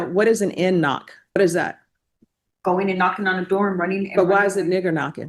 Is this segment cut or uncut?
cut